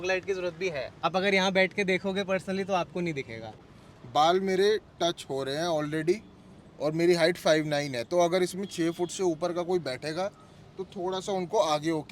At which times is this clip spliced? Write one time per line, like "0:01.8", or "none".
0:00.9
0:03.7